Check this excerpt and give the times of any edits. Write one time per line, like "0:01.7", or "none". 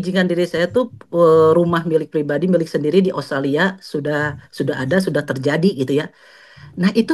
none